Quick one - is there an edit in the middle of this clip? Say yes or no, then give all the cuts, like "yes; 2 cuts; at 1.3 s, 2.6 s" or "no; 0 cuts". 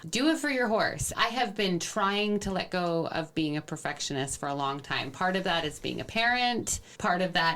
no; 0 cuts